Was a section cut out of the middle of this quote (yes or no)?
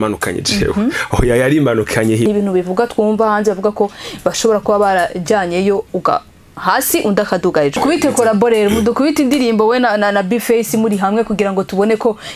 yes